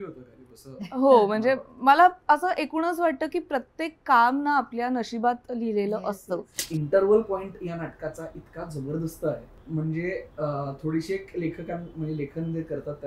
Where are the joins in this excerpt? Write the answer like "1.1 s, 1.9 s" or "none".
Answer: 6.6 s